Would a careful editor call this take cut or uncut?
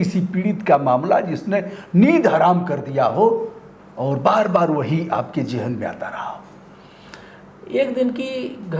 uncut